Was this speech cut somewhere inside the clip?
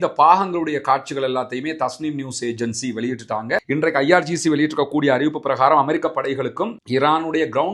yes; 1 cut; at 3.6 s

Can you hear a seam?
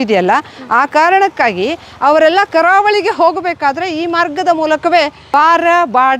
yes; 1 cut; at 5.2 s

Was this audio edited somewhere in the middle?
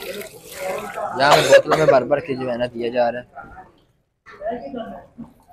no; 0 cuts

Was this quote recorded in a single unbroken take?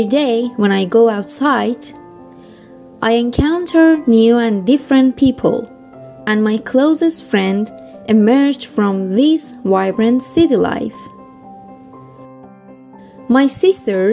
no; 2 cuts; at 10.9 s, 12.6 s

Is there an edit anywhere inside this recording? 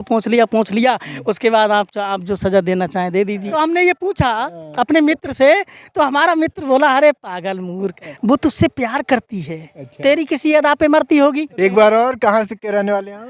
yes; 2 cuts; at 3.4 s, 11.5 s

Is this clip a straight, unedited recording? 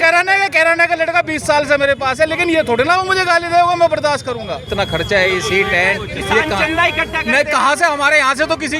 no; 1 cut; at 4.7 s

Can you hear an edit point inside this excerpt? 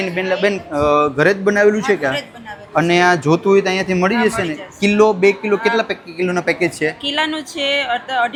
no; 0 cuts

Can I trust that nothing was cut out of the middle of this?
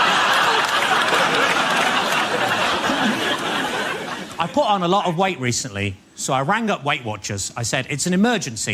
no; 1 cut; at 3.1 s

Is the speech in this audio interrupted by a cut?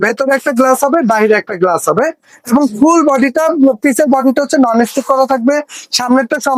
no; 0 cuts

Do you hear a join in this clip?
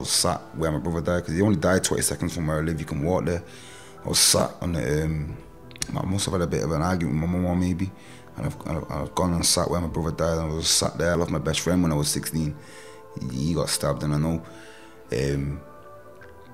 yes; 1 cut; at 11.1 s

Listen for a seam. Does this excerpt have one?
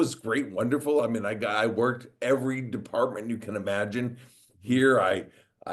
no; 0 cuts

